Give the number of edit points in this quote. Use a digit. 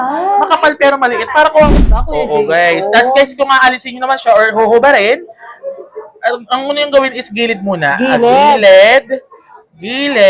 1